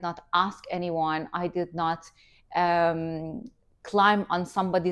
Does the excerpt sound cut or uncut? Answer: uncut